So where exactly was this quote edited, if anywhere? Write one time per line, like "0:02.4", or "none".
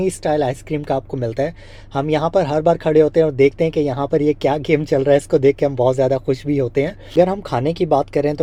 none